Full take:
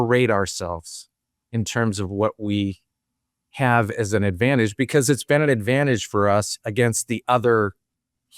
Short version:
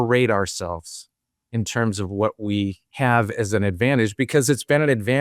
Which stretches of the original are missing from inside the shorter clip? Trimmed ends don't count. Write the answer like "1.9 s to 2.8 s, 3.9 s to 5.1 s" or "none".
2.8 s to 3.4 s